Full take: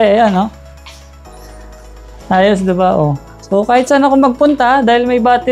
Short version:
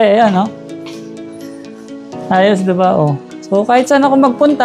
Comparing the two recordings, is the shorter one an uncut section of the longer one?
yes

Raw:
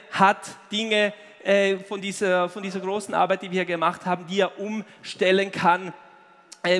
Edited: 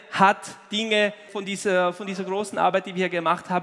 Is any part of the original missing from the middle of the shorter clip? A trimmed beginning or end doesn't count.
yes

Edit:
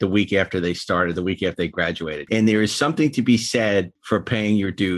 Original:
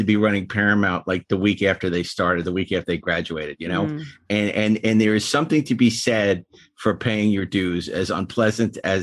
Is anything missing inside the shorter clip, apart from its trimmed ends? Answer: yes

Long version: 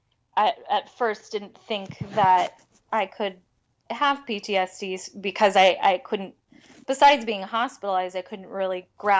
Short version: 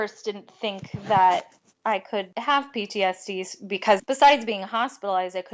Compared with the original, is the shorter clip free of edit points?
no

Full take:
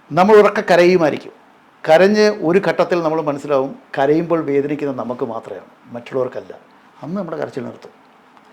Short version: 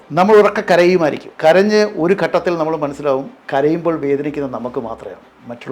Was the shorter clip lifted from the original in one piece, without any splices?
no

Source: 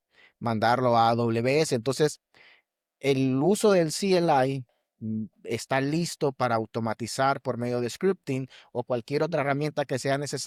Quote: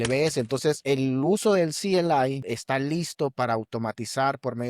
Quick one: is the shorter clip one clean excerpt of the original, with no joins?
no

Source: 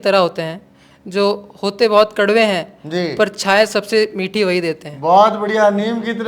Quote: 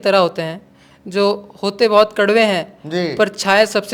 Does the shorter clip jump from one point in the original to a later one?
no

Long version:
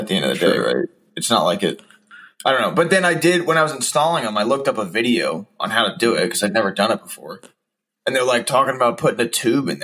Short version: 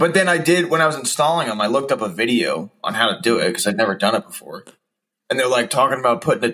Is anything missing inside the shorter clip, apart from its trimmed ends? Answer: no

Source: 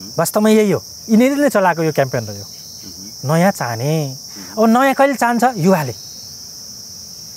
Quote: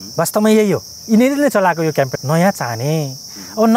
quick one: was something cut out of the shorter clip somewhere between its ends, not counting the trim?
yes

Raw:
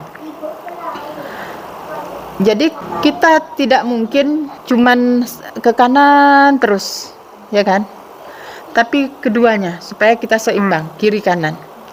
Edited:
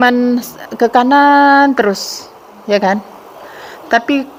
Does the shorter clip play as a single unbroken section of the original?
yes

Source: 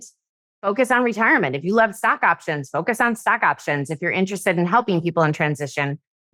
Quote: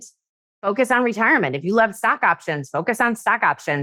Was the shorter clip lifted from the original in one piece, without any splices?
yes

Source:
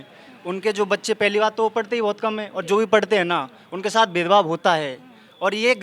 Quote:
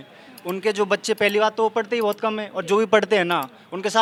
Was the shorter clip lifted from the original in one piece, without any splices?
yes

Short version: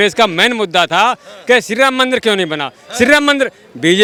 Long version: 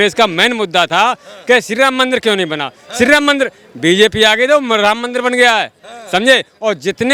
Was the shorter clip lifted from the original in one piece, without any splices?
yes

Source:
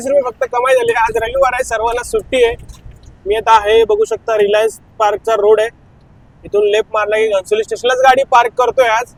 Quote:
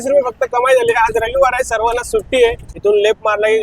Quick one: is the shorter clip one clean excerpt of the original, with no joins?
no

